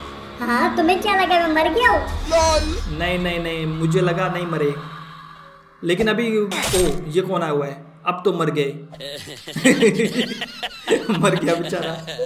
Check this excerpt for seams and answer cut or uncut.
uncut